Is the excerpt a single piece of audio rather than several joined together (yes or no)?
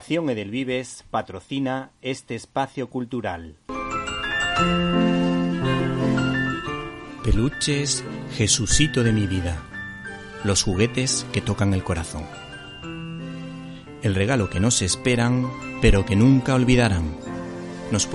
no